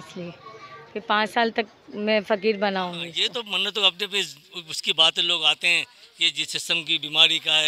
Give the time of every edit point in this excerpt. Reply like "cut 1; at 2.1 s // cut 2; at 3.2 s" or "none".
cut 1; at 3.1 s